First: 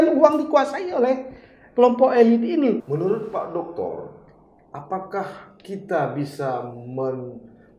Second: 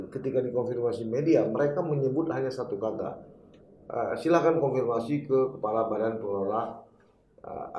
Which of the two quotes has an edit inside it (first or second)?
first